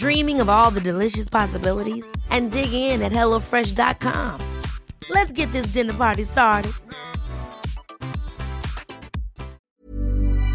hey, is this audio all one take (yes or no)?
no